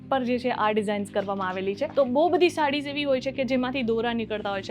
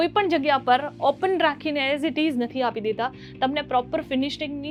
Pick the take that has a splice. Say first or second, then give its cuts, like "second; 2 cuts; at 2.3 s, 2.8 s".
first; 1 cut; at 1.9 s